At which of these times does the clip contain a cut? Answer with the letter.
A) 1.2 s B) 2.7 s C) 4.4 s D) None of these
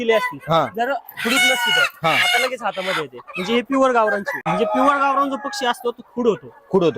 C